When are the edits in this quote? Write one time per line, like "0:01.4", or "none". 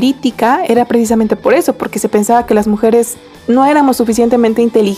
none